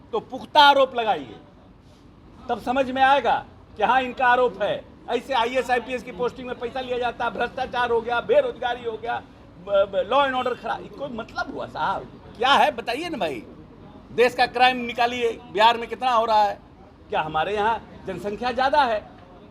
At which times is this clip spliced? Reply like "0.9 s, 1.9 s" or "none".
none